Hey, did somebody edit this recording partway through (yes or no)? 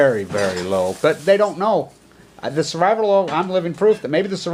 yes